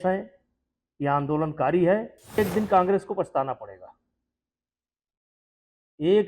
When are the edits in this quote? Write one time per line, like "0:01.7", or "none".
0:02.4